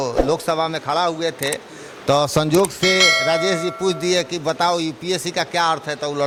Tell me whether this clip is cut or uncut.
uncut